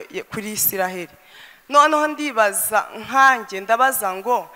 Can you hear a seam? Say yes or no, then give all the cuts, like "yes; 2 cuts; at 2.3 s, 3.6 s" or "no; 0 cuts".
no; 0 cuts